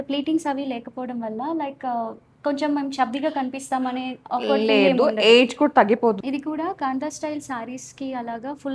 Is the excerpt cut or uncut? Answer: cut